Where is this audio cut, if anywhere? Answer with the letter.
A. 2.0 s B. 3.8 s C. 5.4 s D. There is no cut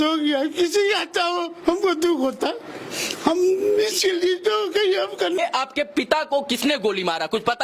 C